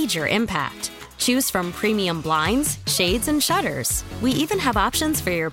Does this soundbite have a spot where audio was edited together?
no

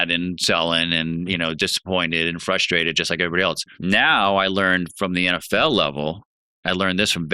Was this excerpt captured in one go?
no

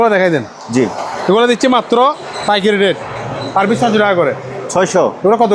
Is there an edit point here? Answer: no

